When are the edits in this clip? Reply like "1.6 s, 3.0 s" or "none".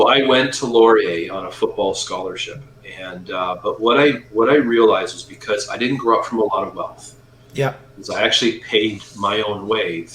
none